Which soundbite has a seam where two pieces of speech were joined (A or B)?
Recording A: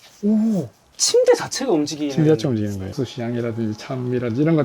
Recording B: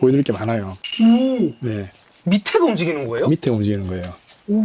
A